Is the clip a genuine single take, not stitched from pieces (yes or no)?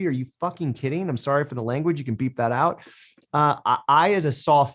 yes